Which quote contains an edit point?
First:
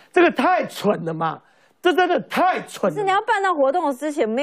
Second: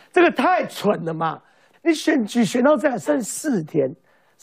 second; 1 cut; at 1.7 s

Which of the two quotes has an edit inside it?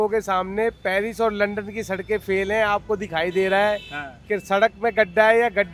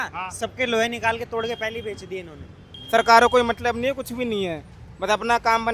second; 1 cut; at 2.7 s

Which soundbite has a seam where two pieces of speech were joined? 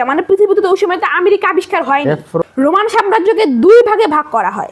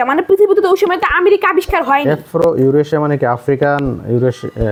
first; 1 cut; at 2.4 s

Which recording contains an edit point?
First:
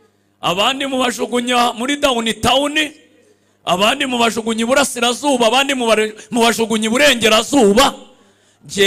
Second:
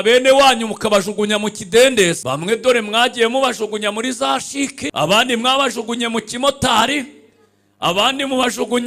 second; 2 cuts; at 2.2 s, 4.8 s

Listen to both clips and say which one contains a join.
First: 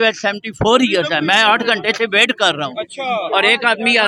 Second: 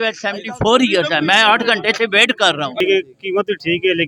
second; 1 cut; at 2.8 s

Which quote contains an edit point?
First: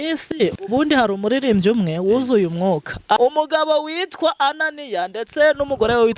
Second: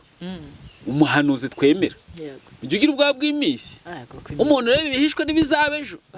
first; 1 cut; at 3.2 s

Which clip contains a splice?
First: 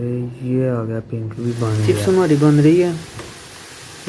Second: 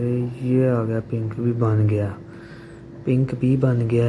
first; 1 cut; at 1.8 s

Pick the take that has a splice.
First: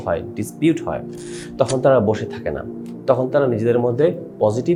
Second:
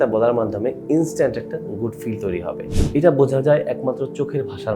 second; 1 cut; at 2.7 s

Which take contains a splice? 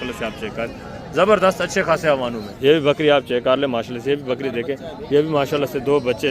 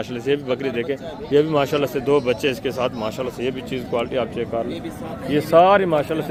first; 1 cut; at 2.4 s

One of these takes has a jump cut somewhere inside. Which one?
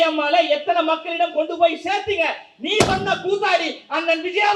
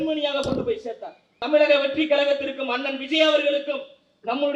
second; 1 cut; at 1.4 s

